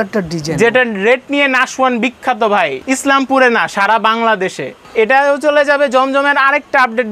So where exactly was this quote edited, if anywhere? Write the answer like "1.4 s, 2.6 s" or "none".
2.8 s, 4.8 s